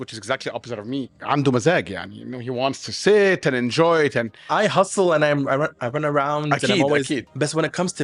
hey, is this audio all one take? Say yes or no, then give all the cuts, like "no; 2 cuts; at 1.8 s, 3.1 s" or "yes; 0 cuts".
no; 2 cuts; at 1.1 s, 4.5 s